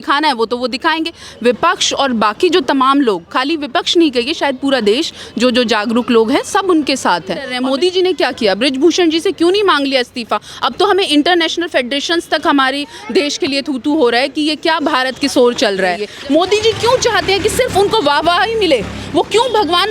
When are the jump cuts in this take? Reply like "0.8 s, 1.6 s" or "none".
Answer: 7.5 s, 16.1 s